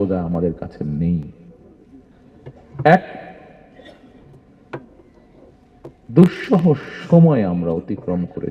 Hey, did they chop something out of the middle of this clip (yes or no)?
no